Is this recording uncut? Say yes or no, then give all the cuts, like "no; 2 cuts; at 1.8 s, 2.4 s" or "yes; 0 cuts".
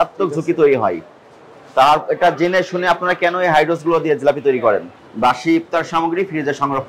no; 1 cut; at 5.0 s